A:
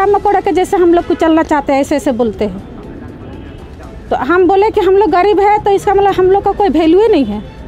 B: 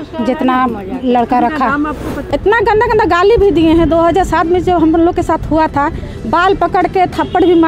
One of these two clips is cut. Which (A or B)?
B